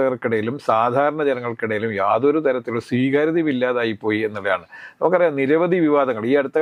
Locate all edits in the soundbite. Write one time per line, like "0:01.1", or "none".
none